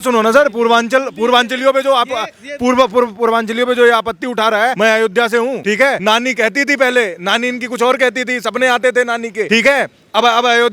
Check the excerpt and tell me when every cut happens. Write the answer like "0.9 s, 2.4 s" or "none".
4.7 s, 5.9 s, 9.5 s